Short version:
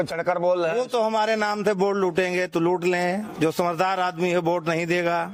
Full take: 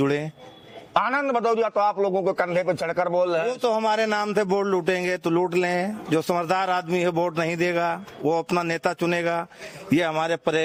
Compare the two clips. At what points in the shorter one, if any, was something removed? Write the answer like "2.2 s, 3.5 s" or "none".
none

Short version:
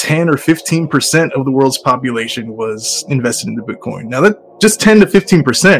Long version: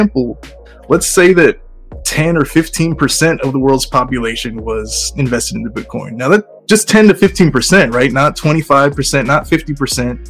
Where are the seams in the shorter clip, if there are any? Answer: none

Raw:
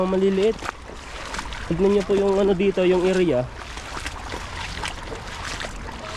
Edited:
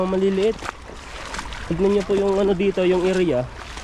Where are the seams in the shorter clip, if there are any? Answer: none

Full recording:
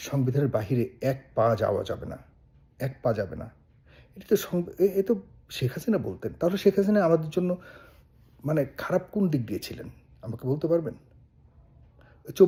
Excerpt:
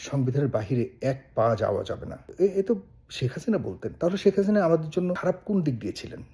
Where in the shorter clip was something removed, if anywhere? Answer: 2.3 s, 5.2 s

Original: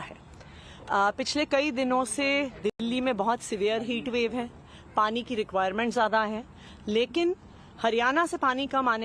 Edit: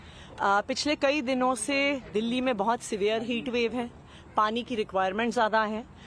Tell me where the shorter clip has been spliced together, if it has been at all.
2.2 s

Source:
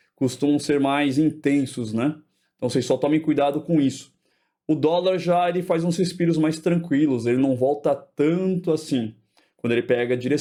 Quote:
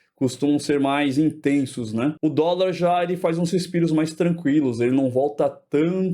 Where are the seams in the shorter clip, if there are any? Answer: 2.2 s

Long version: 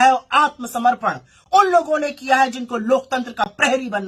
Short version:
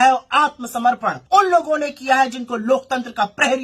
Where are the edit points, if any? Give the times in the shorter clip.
1.1 s

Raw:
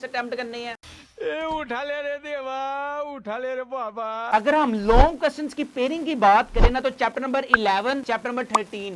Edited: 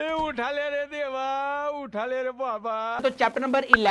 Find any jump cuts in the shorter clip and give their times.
3.0 s

